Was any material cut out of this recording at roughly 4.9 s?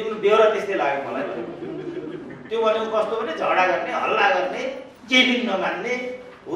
yes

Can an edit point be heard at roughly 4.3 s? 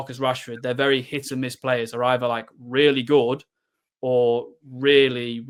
no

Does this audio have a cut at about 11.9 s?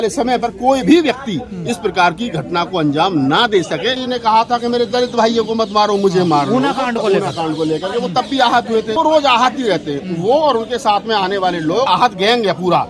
yes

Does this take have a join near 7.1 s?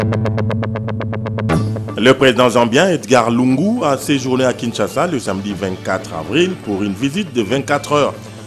no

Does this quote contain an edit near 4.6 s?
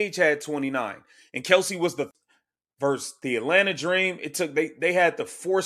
no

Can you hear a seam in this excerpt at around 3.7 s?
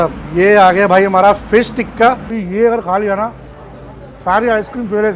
no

